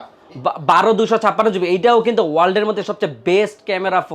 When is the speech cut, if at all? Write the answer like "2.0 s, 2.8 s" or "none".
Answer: none